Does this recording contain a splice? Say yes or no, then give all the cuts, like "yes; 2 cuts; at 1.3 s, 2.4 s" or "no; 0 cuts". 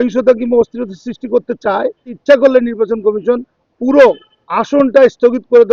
yes; 1 cut; at 2.1 s